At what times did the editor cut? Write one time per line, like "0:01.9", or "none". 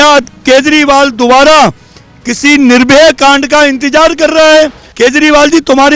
0:04.8